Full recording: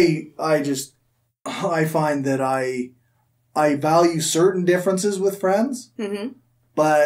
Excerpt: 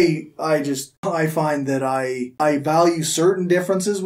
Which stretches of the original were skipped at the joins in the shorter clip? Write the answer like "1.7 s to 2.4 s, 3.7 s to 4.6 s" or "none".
0.9 s to 1.5 s, 2.9 s to 3.5 s